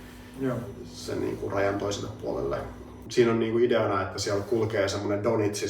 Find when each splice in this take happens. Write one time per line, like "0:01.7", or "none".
0:03.0